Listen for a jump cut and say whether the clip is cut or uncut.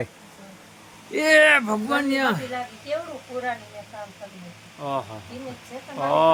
uncut